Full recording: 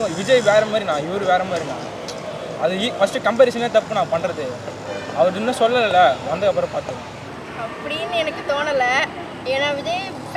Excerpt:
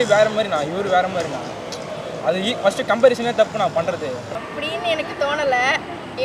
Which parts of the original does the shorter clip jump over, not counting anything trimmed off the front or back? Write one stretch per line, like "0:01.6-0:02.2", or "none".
0:04.7-0:07.6